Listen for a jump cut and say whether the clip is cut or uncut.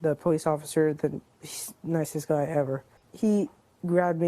cut